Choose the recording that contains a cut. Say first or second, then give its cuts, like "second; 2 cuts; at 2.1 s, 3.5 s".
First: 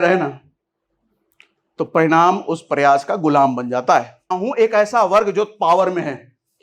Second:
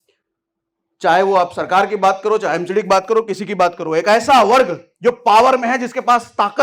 first; 1 cut; at 4.4 s